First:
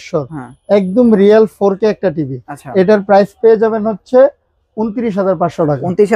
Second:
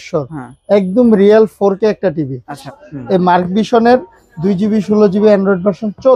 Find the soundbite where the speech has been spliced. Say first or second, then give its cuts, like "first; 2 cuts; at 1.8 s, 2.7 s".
second; 1 cut; at 2.6 s